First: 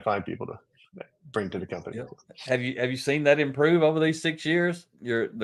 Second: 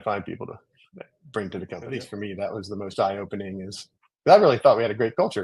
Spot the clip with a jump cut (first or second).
second